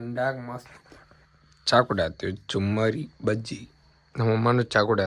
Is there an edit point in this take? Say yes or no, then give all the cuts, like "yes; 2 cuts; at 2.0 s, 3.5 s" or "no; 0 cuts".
no; 0 cuts